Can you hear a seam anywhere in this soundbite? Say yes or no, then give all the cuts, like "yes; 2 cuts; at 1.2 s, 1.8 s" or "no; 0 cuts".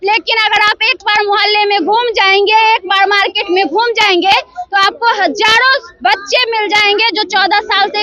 no; 0 cuts